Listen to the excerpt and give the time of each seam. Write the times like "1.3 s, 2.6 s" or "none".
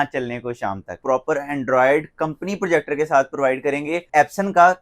0.9 s, 4.1 s